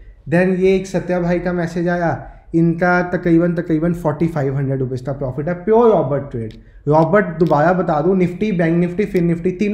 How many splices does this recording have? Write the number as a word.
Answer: zero